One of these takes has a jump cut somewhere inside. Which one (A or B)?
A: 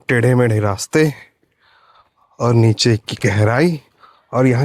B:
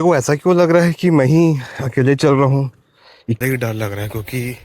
B